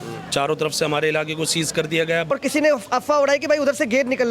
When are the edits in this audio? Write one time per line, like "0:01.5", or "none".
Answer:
0:02.3